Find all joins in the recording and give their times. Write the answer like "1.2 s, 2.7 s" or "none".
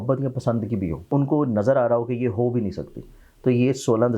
1.1 s